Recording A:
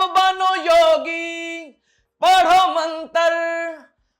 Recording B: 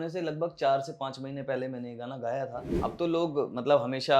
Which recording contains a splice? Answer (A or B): B